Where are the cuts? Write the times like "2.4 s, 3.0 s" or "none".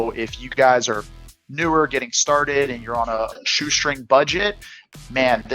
3.3 s